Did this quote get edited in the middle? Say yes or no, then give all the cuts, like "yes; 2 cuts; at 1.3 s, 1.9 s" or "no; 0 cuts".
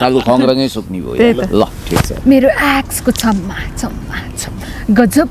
no; 0 cuts